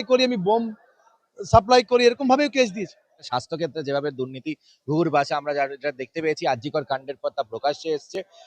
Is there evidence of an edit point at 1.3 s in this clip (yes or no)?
no